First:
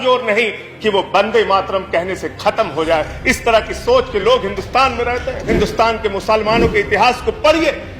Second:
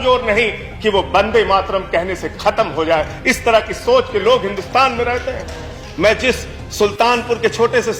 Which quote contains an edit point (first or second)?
first